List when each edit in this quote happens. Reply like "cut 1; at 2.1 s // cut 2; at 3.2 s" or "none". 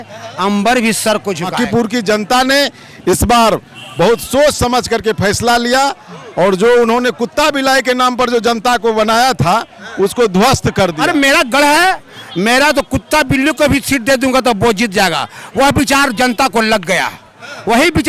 cut 1; at 1.5 s // cut 2; at 11.0 s